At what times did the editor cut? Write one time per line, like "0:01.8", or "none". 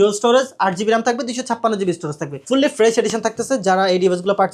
none